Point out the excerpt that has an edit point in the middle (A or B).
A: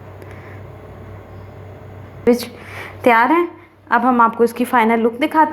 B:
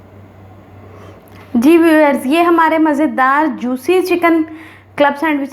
A